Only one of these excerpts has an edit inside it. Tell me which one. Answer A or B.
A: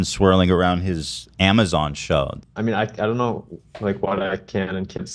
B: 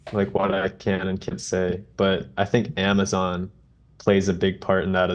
A